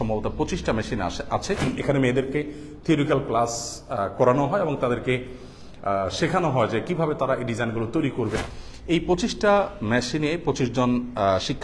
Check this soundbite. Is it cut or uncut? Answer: cut